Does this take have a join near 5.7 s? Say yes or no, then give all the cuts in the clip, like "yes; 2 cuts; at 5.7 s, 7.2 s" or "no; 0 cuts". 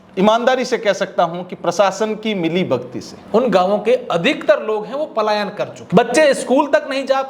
yes; 2 cuts; at 3.2 s, 5.7 s